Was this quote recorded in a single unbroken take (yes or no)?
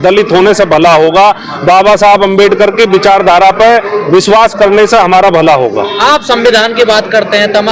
yes